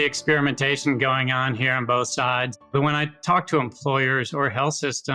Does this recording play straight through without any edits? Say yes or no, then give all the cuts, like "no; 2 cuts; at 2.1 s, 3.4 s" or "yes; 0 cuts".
yes; 0 cuts